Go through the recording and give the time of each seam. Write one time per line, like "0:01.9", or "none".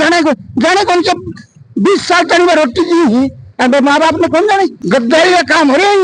0:04.7

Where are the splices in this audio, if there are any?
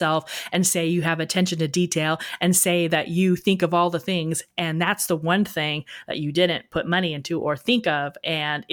none

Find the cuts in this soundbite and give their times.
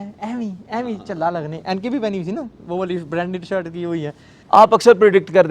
0:04.3

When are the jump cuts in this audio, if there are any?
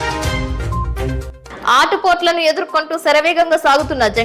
0:01.1

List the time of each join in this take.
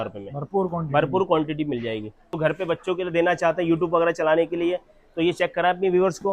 0:02.4

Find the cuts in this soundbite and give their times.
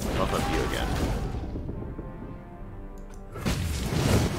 none

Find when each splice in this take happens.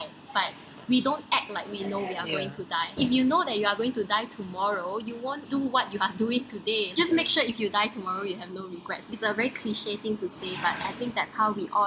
0:02.9
0:05.4
0:06.9
0:09.0

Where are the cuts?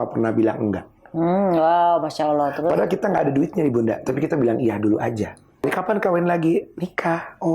0:05.6

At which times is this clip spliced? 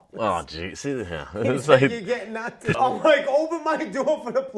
0:02.7

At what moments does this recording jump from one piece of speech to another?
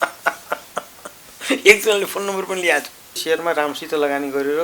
0:03.2

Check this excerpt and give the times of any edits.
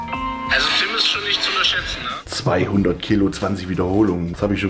0:02.1

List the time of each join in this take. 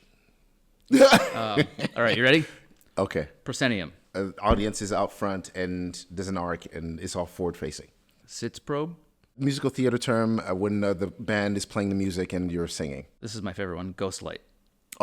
0:04.0
0:08.2
0:09.4
0:13.2

